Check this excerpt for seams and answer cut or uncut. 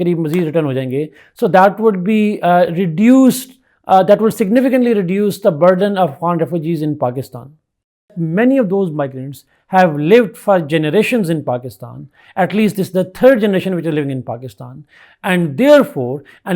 cut